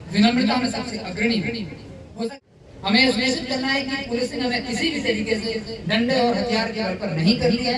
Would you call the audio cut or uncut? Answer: cut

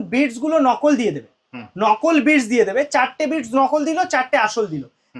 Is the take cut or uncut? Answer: uncut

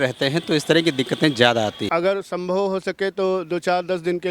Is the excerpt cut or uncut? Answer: cut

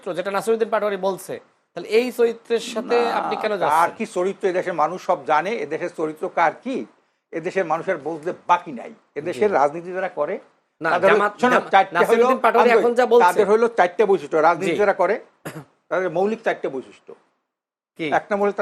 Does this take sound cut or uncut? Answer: uncut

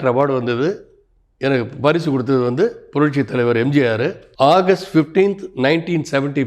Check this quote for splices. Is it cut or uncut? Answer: cut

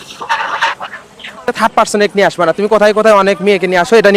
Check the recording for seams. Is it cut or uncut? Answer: cut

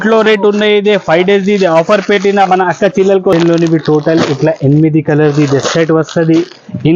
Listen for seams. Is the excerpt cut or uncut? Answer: cut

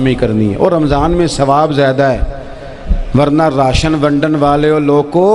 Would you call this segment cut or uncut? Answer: uncut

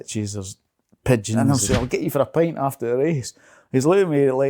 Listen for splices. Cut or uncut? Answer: cut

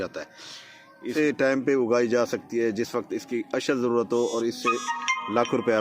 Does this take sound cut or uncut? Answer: cut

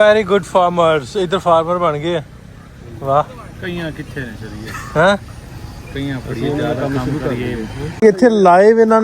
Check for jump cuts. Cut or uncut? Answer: cut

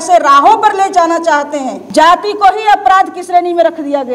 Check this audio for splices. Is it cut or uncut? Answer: cut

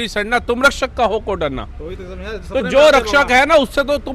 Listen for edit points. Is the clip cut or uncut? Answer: uncut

